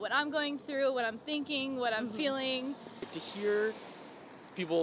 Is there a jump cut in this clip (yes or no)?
yes